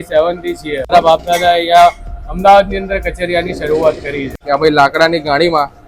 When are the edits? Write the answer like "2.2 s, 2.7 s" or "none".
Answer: 0.9 s, 4.3 s

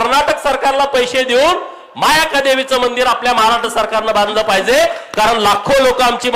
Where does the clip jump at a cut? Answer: none

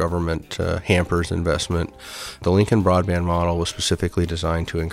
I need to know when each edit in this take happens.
2.4 s

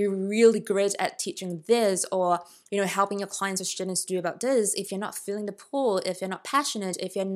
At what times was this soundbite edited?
none

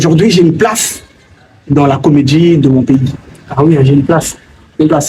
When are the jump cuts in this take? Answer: none

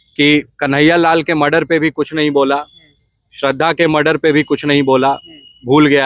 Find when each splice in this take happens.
none

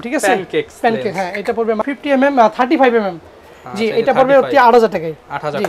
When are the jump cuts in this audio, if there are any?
1.9 s

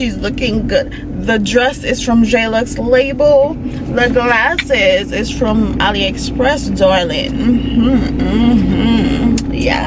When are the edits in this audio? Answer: none

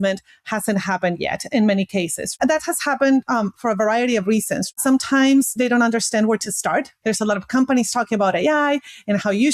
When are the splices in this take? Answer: 2.3 s, 4.7 s, 6.9 s

